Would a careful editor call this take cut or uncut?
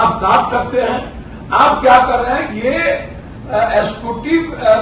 uncut